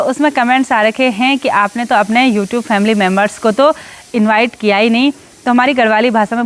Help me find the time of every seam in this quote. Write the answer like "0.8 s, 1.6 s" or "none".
none